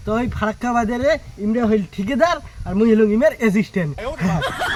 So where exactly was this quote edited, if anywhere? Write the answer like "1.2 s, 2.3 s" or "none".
none